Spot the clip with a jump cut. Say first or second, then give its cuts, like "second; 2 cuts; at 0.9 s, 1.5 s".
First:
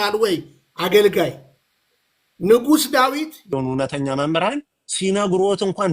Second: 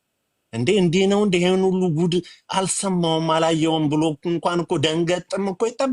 first; 1 cut; at 3.4 s